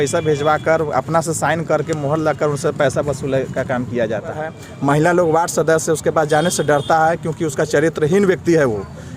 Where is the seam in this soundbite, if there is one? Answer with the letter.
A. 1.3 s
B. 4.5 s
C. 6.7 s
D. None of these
B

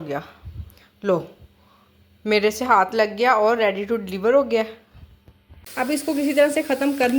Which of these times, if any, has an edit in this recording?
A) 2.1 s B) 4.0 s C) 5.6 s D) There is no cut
C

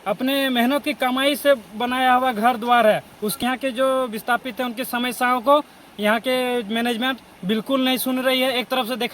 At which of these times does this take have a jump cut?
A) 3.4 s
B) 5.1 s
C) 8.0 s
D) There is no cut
A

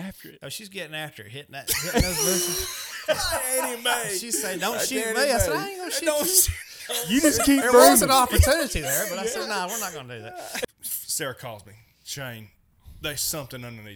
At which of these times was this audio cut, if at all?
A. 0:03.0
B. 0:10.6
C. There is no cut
B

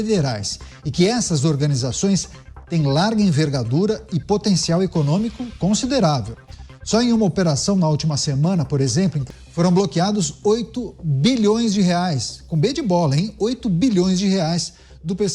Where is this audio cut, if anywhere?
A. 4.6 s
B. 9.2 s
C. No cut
B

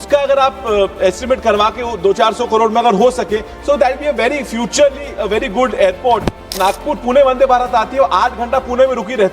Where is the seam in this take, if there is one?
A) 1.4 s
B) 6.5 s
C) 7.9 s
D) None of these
B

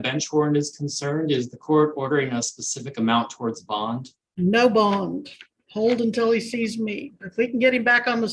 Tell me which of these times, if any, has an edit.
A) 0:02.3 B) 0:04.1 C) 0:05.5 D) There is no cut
D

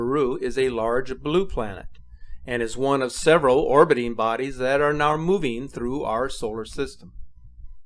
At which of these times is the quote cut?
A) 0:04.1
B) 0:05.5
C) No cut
B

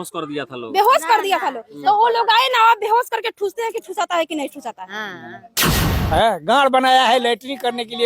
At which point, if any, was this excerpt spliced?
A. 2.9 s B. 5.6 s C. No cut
B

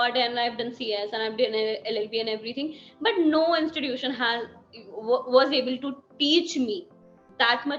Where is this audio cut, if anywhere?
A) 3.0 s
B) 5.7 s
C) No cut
C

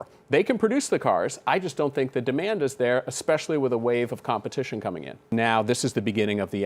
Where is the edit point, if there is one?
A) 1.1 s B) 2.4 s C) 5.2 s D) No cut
C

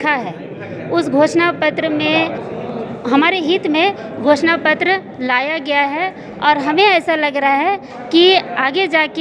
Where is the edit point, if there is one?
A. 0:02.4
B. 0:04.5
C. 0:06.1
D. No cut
A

